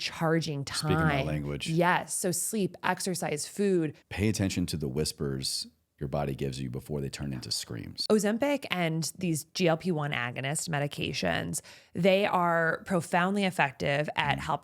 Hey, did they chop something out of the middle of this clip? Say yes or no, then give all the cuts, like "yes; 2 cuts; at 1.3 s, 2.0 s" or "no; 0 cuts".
yes; 2 cuts; at 4.0 s, 7.9 s